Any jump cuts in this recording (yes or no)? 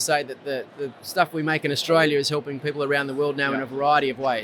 no